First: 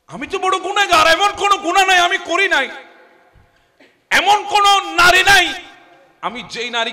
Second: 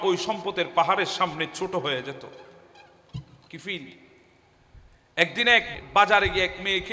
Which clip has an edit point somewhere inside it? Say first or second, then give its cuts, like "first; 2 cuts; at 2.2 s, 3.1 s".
second; 1 cut; at 5.7 s